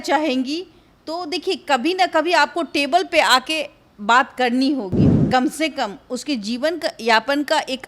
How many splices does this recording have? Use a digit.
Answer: 1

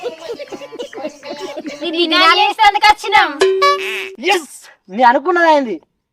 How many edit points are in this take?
1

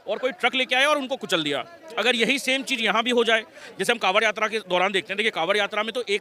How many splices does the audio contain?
0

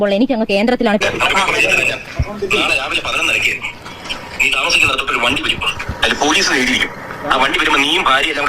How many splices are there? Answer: 1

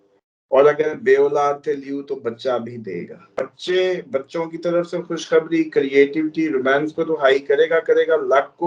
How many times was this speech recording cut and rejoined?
1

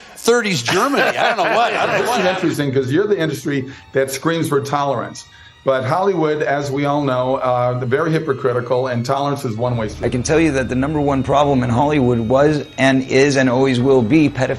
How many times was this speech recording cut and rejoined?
2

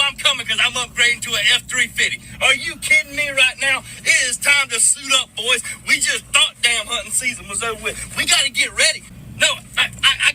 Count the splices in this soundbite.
1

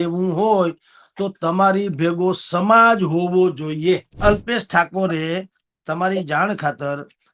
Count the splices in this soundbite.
1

